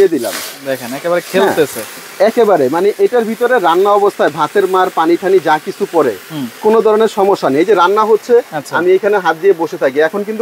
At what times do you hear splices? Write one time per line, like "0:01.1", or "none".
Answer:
none